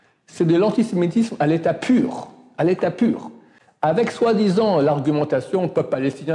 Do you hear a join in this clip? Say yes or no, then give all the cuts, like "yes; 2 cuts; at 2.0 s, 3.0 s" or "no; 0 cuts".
no; 0 cuts